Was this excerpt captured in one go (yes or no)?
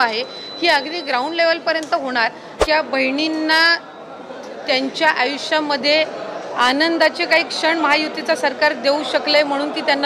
no